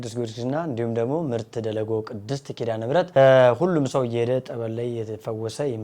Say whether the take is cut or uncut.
cut